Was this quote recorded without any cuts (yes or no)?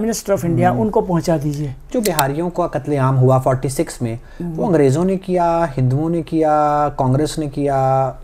no